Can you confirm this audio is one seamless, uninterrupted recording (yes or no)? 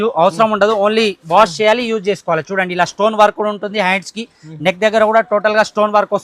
yes